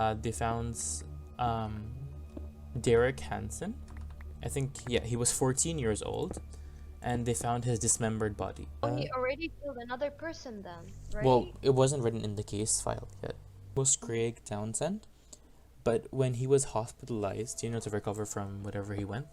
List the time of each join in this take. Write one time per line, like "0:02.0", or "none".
0:08.8
0:13.7